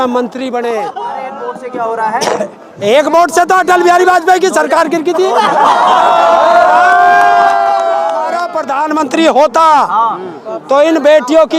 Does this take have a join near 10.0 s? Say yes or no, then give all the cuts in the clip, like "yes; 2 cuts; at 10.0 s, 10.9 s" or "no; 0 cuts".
no; 2 cuts; at 1.2 s, 8.5 s